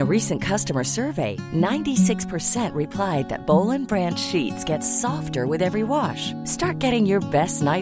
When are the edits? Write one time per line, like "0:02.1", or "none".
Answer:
none